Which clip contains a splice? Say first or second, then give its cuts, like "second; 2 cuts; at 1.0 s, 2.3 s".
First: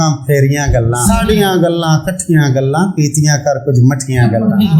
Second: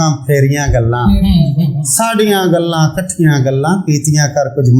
first; 1 cut; at 1.2 s